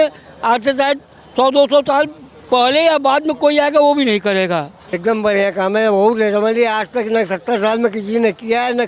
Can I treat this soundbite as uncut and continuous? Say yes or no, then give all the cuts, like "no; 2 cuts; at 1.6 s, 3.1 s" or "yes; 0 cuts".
no; 1 cut; at 5.0 s